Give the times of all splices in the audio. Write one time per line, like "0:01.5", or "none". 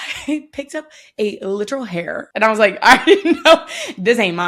none